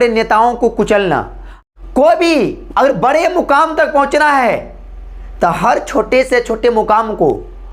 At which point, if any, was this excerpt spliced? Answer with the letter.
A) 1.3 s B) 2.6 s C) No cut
A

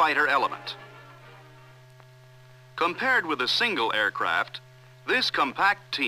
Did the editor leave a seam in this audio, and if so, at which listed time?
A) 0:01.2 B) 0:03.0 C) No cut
C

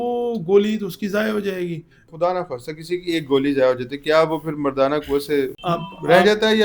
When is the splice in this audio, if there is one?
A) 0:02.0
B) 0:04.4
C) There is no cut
A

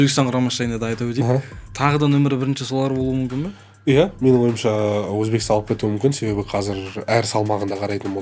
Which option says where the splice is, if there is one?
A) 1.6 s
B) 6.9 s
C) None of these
A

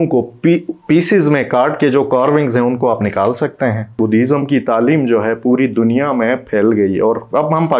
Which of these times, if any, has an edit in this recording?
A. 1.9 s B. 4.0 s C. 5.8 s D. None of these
B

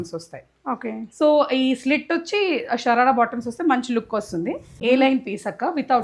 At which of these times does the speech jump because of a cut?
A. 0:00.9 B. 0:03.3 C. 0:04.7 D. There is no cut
C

